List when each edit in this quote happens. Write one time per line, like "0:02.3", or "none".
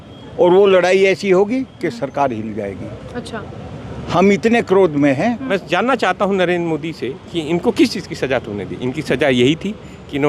0:05.4